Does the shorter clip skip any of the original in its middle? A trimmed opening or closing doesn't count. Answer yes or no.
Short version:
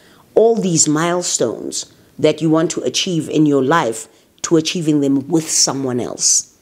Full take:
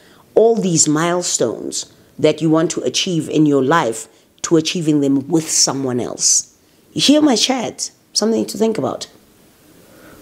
no